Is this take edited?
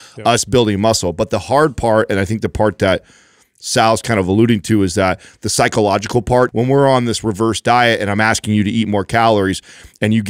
yes; 1 cut; at 6.5 s

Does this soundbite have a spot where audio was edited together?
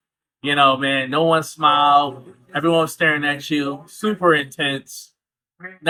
no; 0 cuts

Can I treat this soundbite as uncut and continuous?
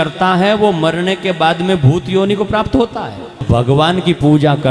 no; 1 cut; at 3.5 s

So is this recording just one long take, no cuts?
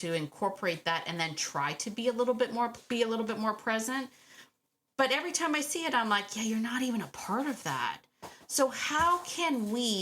no; 1 cut; at 2.8 s

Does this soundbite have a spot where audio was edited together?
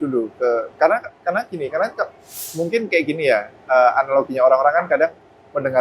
yes; 1 cut; at 2.5 s

